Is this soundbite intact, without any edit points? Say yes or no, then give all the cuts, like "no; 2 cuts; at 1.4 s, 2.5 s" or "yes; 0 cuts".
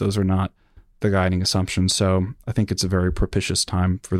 yes; 0 cuts